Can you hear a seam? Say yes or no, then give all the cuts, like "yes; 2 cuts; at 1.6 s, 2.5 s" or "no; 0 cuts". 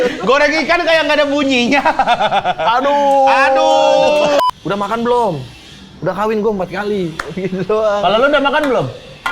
yes; 1 cut; at 4.4 s